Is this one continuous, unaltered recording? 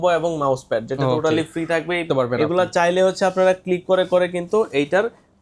no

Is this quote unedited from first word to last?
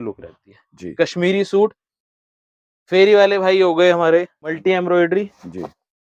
no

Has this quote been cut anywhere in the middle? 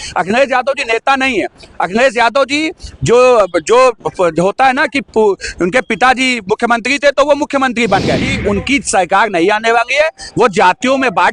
yes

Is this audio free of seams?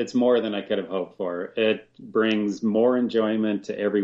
yes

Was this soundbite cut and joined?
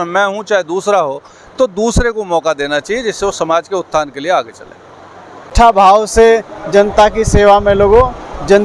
yes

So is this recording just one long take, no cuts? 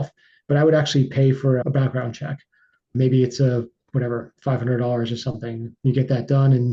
yes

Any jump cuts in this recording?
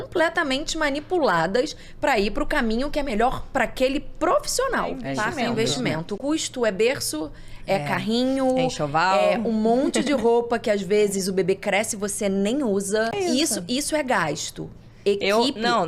yes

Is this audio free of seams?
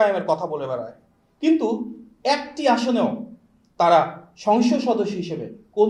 yes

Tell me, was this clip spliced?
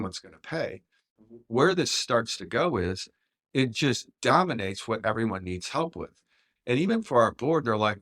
yes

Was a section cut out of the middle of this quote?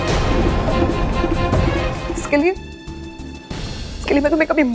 yes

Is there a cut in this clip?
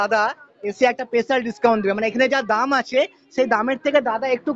no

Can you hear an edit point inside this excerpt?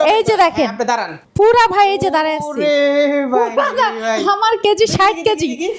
yes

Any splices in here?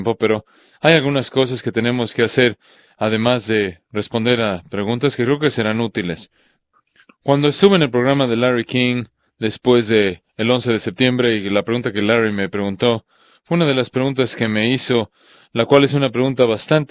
no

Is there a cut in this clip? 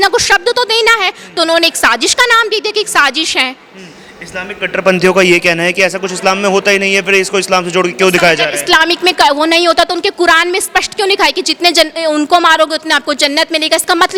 no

